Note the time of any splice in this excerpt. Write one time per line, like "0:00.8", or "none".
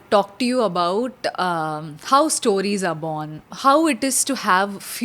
none